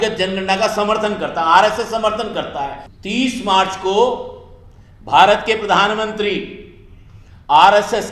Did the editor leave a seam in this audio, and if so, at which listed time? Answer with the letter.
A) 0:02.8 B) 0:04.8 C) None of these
A